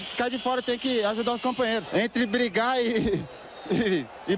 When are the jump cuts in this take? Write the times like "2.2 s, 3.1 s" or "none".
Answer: 1.9 s